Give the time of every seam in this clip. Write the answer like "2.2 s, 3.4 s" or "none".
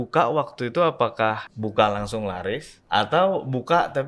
1.5 s, 2.7 s